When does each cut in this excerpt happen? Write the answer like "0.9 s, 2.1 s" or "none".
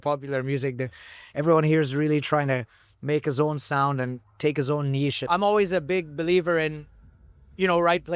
5.2 s